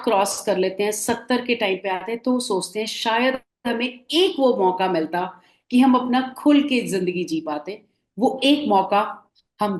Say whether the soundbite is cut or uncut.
uncut